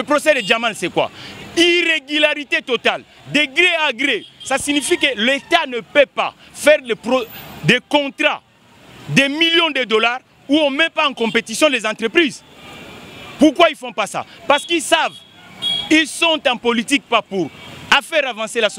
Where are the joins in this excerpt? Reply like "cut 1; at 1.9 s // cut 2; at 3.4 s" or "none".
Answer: none